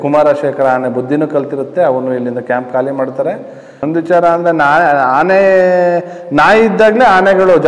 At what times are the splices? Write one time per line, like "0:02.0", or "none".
0:03.7